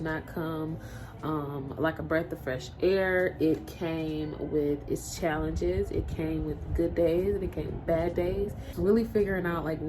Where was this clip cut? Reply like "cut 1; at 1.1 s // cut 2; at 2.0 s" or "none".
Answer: cut 1; at 8.6 s